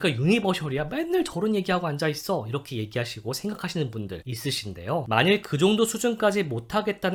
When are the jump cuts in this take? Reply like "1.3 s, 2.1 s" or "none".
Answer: none